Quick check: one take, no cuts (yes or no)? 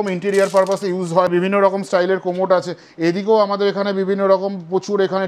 no